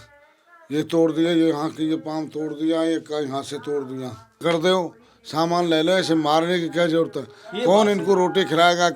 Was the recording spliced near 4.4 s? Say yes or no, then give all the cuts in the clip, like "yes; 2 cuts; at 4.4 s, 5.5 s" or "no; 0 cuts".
yes; 1 cut; at 4.4 s